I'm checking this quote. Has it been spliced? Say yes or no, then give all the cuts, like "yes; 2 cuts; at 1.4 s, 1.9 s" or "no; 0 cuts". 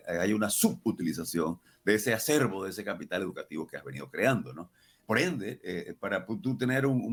no; 0 cuts